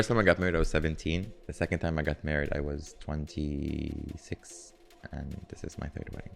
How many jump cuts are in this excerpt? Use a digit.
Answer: 1